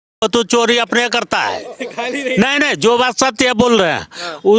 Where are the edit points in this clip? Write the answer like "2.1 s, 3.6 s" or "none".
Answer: none